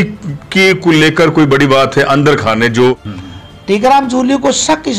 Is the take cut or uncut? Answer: cut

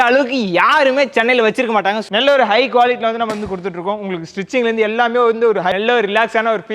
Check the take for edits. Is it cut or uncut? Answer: cut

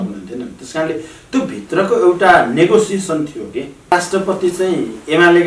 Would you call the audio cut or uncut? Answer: cut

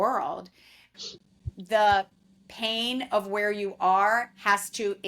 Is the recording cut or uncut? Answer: cut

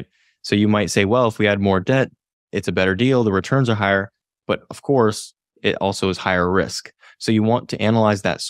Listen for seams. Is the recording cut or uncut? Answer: uncut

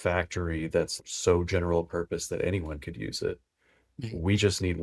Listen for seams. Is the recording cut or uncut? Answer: cut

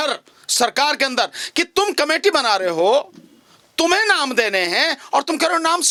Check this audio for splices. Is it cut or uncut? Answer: uncut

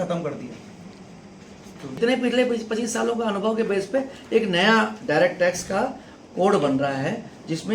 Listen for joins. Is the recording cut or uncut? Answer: cut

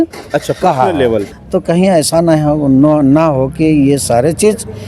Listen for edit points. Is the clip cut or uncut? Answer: cut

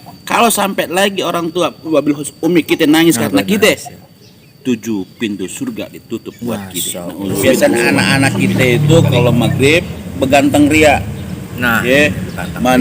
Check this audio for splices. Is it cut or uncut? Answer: cut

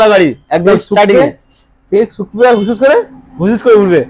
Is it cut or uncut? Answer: uncut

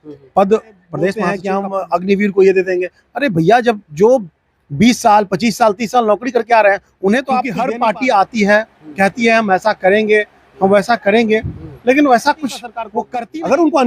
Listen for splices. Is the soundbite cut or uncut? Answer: cut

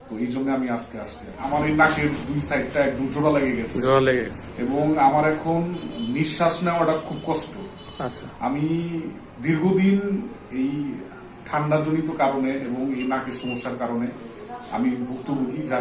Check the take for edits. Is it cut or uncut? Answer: cut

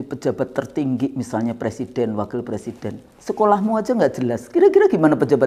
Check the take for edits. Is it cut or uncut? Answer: uncut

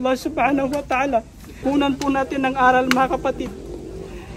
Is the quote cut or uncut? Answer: cut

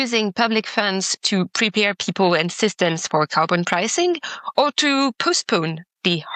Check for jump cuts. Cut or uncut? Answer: uncut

